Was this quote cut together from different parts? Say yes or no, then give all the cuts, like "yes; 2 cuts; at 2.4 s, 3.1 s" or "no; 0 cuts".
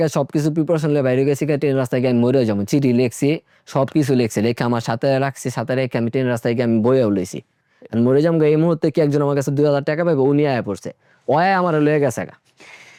no; 0 cuts